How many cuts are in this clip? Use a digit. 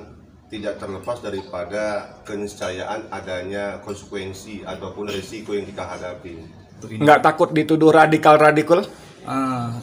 1